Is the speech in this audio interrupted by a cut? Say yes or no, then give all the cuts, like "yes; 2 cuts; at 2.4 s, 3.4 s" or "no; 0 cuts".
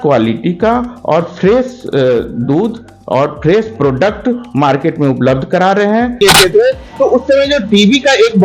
yes; 1 cut; at 6.2 s